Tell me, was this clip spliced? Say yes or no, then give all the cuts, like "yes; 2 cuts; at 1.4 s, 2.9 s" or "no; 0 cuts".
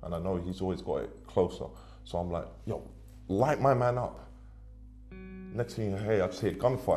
no; 0 cuts